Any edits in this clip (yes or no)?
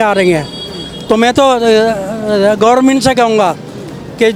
no